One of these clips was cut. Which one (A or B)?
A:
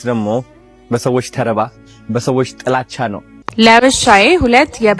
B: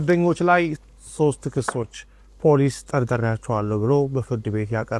A